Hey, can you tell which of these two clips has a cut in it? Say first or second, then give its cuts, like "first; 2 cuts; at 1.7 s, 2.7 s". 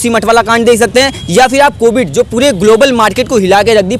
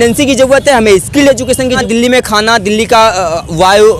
second; 1 cut; at 1.8 s